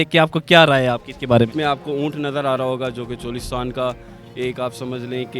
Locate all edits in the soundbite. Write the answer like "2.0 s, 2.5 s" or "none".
1.5 s